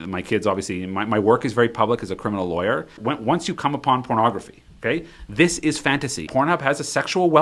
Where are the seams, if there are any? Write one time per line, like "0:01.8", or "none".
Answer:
0:03.0
0:06.3